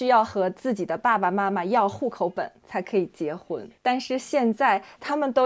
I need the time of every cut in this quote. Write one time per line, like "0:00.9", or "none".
0:03.7